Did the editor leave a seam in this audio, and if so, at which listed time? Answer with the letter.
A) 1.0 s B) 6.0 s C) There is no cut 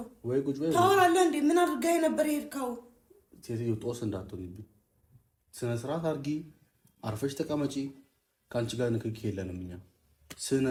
C